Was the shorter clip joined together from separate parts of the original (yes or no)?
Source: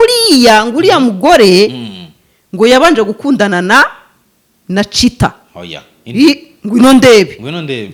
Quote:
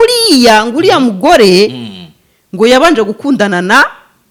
no